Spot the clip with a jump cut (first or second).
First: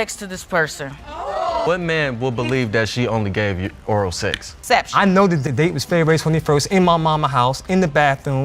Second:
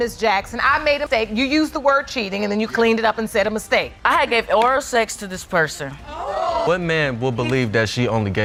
first